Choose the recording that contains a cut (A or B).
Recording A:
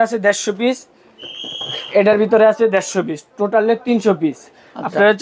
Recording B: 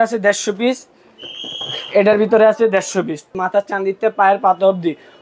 B